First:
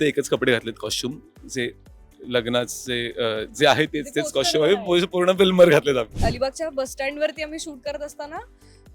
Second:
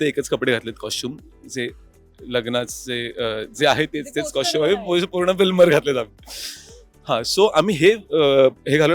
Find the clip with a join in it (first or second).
first